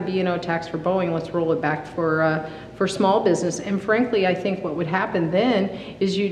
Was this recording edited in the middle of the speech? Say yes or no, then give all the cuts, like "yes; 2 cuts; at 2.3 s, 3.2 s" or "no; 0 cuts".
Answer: no; 0 cuts